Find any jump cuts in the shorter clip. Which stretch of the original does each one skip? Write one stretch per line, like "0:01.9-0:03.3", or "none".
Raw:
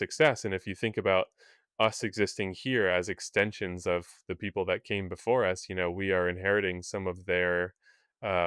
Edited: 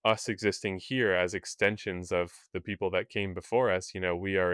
none